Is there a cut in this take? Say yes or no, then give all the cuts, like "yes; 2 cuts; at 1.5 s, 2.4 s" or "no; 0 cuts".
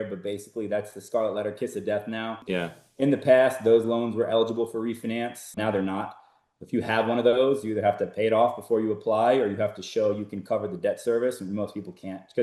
yes; 2 cuts; at 2.4 s, 5.5 s